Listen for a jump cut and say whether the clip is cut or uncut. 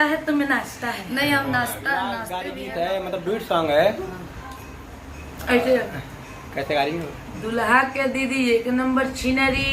cut